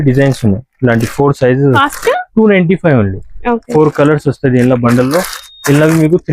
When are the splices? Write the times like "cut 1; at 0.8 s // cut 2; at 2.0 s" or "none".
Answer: cut 1; at 1.8 s

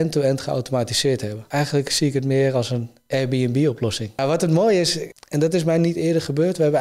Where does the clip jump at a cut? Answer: cut 1; at 1.4 s // cut 2; at 4.2 s // cut 3; at 5.0 s

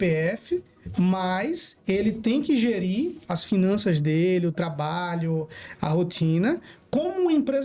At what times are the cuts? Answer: none

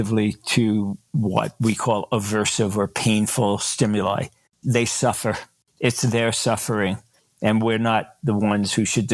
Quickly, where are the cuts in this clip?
none

